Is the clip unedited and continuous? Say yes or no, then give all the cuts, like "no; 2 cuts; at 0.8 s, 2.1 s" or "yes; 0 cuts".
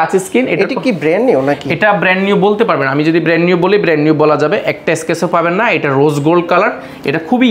yes; 0 cuts